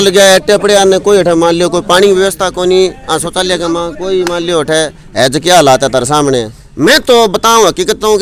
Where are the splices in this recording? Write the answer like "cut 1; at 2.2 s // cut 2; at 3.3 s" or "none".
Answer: cut 1; at 6.7 s